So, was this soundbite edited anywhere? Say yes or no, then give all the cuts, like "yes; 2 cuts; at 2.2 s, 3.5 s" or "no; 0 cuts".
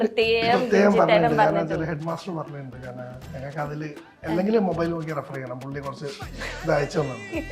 no; 0 cuts